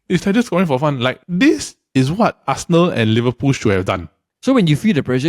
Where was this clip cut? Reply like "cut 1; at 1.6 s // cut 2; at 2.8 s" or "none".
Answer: cut 1; at 4.3 s